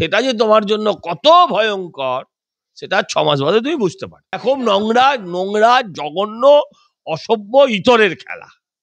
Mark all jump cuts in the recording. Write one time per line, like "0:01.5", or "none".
0:04.3